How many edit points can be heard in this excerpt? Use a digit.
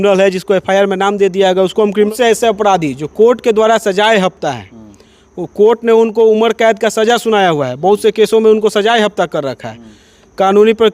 1